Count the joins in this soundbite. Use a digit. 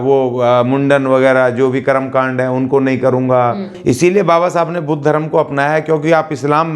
1